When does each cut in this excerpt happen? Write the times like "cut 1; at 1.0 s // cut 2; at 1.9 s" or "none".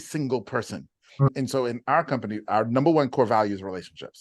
cut 1; at 1.3 s